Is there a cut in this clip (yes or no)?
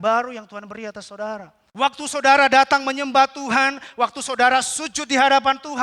yes